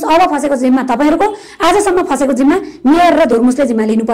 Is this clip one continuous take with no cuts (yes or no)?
yes